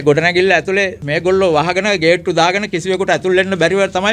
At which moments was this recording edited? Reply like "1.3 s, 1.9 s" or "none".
1.0 s